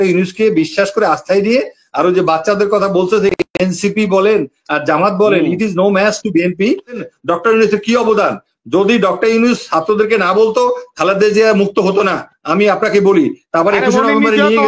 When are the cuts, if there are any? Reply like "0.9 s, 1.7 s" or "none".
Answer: 7.0 s